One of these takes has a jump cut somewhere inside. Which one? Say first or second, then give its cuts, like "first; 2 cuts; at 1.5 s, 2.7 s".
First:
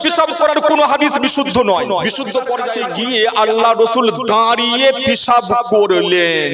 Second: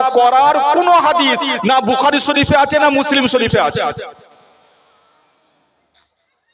first; 1 cut; at 2.8 s